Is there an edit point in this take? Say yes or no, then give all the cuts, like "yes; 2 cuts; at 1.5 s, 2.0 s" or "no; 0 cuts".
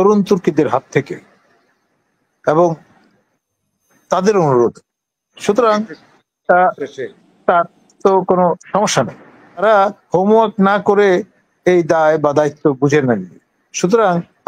yes; 1 cut; at 9.6 s